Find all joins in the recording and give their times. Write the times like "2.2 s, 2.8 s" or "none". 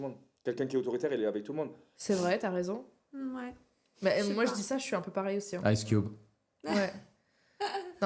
none